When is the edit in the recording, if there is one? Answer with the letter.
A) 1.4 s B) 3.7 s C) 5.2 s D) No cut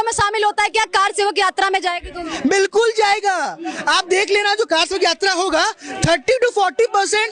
D